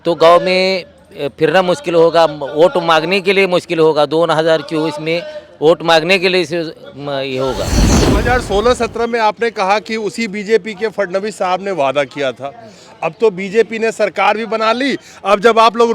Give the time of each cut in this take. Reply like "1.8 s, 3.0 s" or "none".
8.0 s